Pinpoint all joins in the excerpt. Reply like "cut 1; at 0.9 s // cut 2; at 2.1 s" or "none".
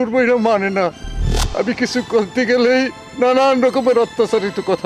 none